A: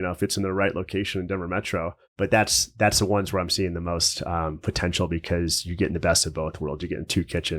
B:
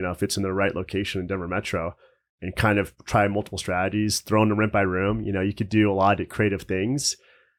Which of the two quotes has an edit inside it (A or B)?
A